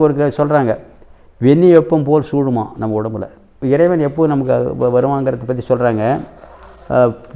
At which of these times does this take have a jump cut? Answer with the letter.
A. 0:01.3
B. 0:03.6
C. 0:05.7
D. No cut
B